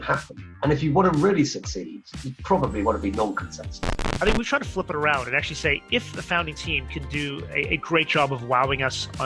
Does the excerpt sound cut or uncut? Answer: cut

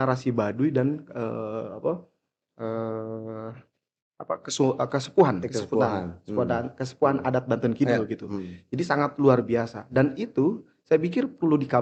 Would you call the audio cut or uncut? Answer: uncut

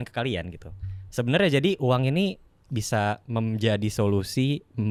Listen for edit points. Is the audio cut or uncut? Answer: uncut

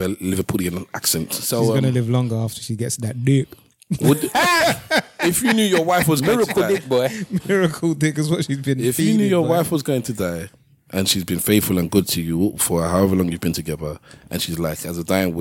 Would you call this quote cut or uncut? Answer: uncut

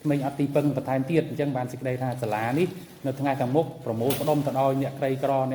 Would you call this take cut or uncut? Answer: uncut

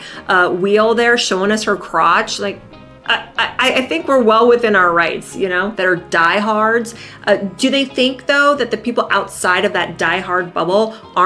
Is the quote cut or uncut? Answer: cut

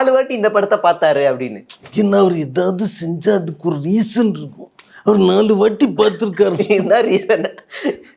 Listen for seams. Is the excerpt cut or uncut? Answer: uncut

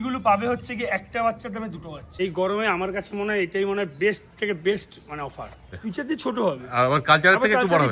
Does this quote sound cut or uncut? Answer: cut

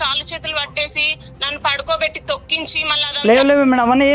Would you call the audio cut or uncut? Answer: cut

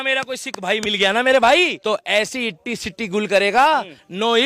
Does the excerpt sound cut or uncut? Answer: cut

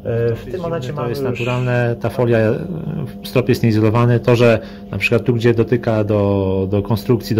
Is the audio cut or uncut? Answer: cut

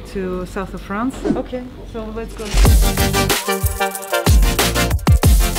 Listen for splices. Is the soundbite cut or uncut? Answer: cut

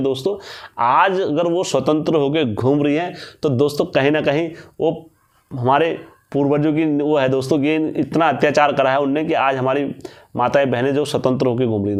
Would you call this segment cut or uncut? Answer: uncut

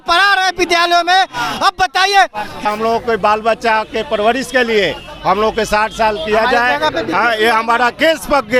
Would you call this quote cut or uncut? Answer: cut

